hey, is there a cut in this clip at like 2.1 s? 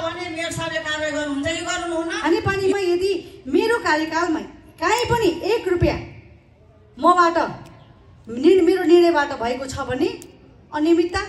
yes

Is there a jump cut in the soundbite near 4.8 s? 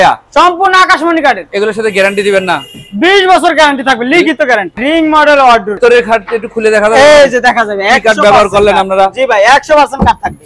yes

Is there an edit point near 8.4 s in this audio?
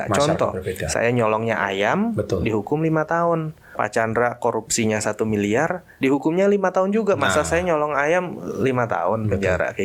no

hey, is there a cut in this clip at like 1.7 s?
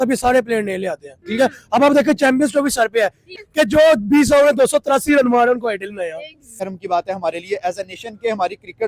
no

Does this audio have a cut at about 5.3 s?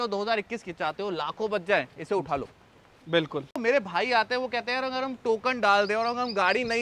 no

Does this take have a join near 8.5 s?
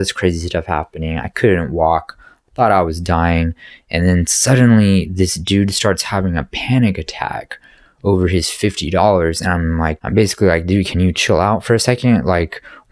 no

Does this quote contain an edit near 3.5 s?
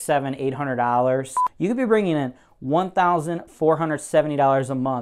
no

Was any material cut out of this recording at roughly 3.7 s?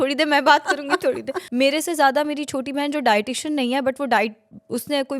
no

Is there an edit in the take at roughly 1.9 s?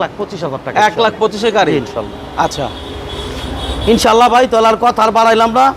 no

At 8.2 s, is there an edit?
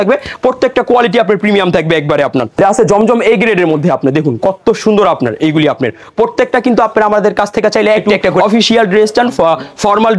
yes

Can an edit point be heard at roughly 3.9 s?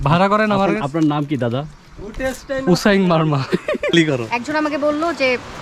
yes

